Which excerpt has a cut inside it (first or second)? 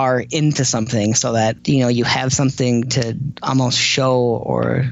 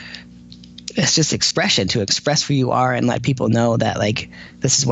first